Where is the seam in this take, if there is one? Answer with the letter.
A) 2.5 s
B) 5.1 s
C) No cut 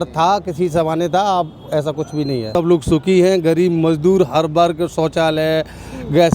A